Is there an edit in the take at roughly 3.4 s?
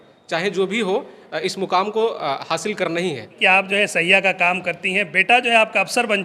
yes; 1 cut; at 3.4 s

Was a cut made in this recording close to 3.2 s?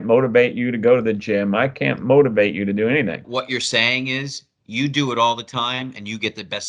yes; 1 cut; at 3.2 s

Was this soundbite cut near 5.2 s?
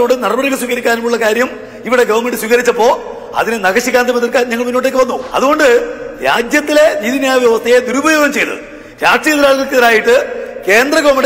yes; 1 cut; at 5.2 s

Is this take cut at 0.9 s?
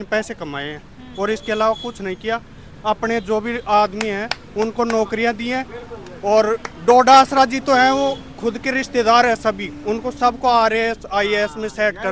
no; 0 cuts

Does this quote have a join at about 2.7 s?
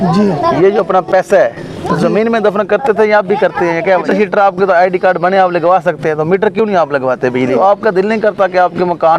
no; 2 cuts; at 4.0 s, 7.4 s

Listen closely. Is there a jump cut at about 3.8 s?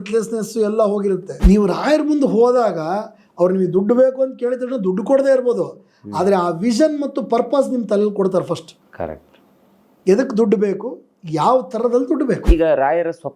no; 2 cuts; at 1.3 s, 12.4 s

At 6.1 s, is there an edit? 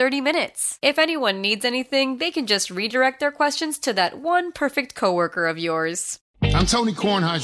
yes; 1 cut; at 6.1 s

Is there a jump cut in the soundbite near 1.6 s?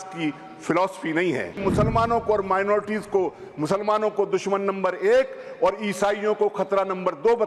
yes; 1 cut; at 1.6 s

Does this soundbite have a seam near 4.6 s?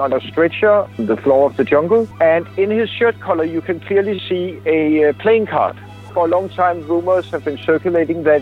no; 3 cuts; at 0.9 s, 2.1 s, 6.0 s

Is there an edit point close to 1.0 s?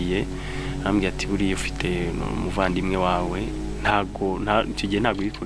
no; 0 cuts

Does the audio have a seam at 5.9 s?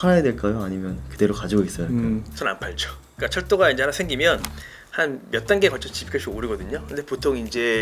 no; 0 cuts

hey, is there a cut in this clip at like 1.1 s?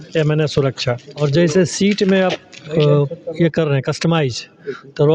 yes; 1 cut; at 1.1 s

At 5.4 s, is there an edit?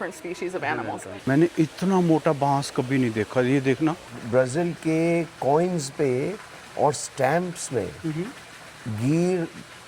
no; 2 cuts; at 1.1 s, 4.1 s

